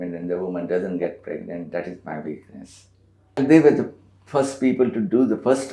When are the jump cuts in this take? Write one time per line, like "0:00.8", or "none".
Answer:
0:03.4